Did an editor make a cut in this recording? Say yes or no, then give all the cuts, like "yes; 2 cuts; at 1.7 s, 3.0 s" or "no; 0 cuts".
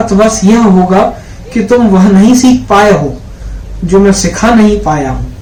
no; 0 cuts